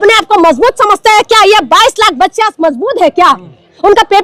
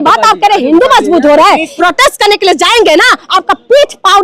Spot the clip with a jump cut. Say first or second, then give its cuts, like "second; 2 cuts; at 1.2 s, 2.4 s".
second; 1 cut; at 1.7 s